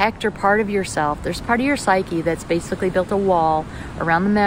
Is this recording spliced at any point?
no; 0 cuts

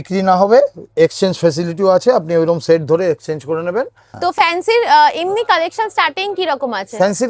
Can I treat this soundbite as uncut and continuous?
no; 1 cut; at 4.0 s

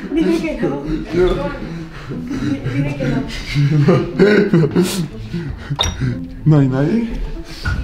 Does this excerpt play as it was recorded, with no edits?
yes; 0 cuts

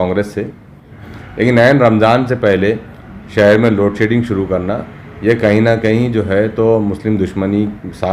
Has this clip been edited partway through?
yes; 1 cut; at 1.0 s

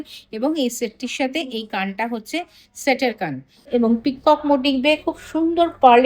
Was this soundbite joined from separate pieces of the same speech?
yes; 1 cut; at 3.7 s

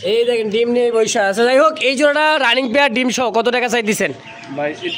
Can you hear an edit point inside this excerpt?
no; 0 cuts

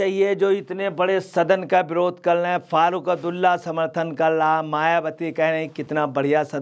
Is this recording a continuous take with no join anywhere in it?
yes; 0 cuts

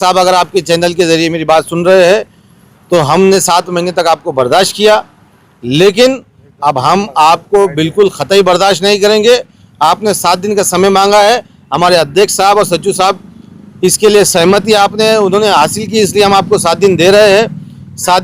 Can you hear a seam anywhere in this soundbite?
no; 0 cuts

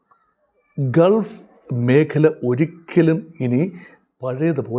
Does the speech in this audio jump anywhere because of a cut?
no; 0 cuts

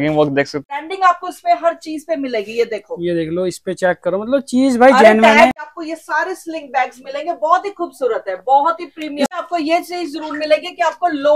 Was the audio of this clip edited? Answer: yes; 3 cuts; at 0.8 s, 5.7 s, 9.4 s

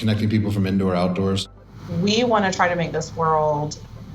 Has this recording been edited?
yes; 1 cut; at 1.4 s

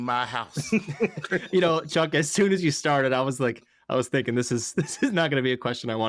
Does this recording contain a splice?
no; 0 cuts

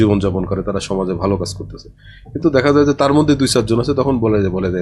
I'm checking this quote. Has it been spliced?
no; 0 cuts

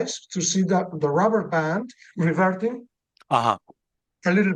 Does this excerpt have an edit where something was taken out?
no; 0 cuts

